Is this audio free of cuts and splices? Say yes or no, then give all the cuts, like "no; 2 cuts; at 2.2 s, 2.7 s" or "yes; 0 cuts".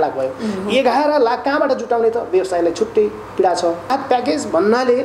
no; 1 cut; at 3.9 s